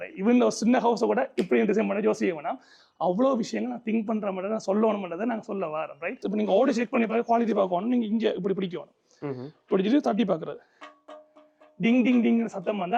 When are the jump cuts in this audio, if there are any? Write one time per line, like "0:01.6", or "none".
0:06.2

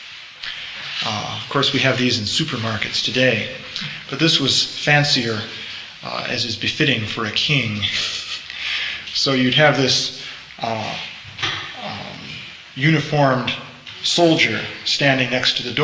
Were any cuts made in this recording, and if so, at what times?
0:14.8

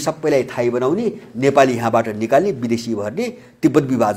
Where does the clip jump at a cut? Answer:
none

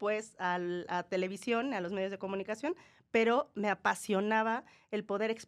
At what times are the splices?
none

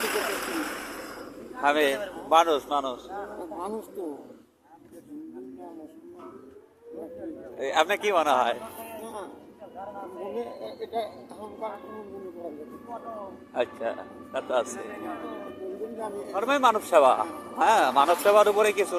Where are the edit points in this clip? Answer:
none

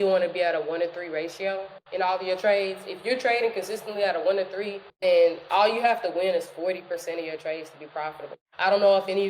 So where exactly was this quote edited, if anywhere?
none

